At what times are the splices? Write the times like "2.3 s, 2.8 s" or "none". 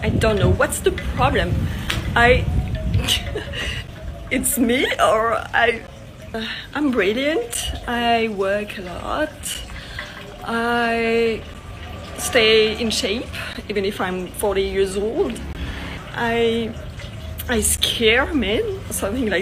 6.4 s, 15.9 s

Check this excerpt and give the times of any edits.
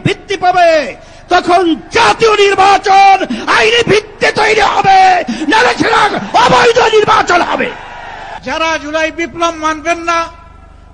8.2 s

